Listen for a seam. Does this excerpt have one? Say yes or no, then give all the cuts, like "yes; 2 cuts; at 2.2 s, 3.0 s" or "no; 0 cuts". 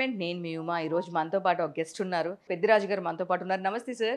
yes; 1 cut; at 2.5 s